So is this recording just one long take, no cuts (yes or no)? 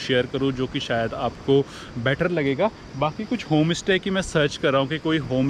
yes